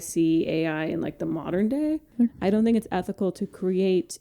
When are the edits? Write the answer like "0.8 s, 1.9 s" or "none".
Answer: 2.1 s